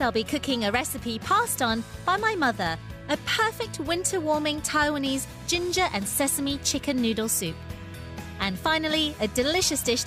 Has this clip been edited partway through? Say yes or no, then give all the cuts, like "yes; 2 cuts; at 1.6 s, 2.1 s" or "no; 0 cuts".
yes; 1 cut; at 6.4 s